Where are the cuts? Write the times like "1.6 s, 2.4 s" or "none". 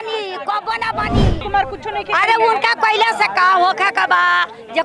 1.4 s